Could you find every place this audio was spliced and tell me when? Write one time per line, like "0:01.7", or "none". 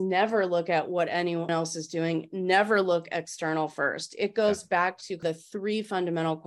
0:01.5
0:05.2